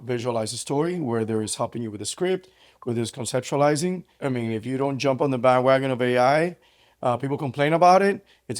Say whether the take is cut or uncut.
cut